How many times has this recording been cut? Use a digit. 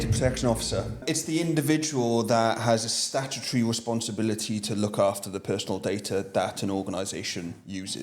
1